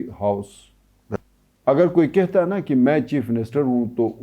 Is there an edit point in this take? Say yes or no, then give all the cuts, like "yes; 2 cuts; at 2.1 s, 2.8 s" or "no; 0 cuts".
yes; 1 cut; at 1.2 s